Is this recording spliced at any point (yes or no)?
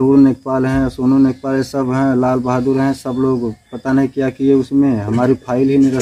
no